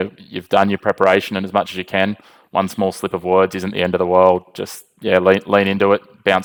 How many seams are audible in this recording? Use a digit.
0